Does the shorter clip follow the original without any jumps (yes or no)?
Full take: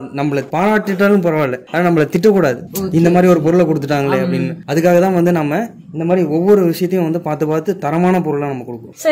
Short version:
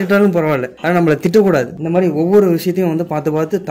no